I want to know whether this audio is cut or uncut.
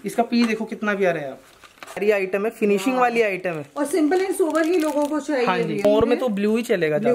cut